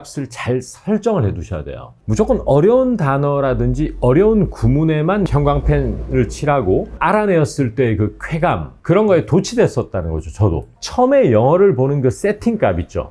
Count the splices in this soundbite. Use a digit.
4